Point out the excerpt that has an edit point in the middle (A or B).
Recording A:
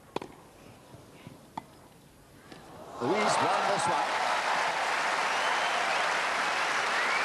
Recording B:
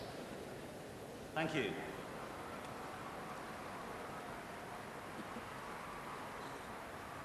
B